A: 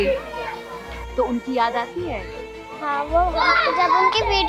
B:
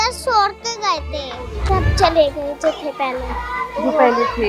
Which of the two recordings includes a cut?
B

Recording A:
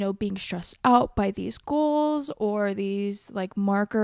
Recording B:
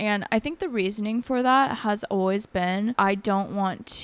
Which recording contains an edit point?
B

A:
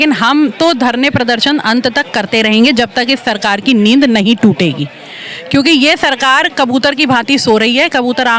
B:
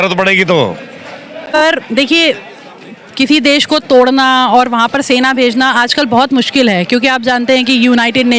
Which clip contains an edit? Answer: B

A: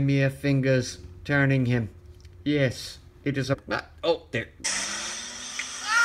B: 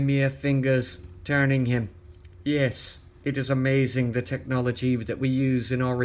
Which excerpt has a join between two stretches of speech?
B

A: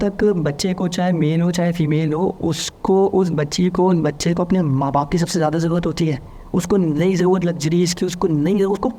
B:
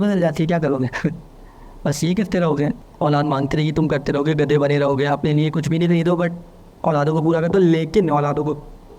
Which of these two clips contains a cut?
B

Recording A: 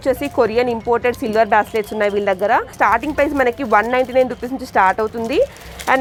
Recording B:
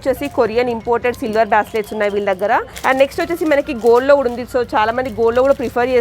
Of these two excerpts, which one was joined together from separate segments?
B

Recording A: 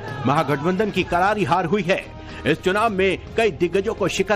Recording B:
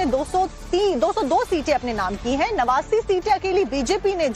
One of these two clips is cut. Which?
B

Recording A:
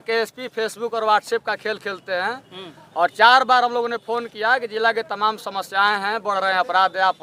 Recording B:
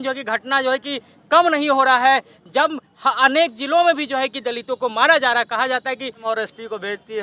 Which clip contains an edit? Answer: B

